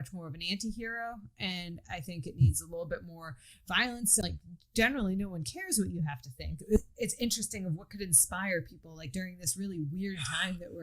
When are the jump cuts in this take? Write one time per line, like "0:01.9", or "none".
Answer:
0:04.4
0:06.8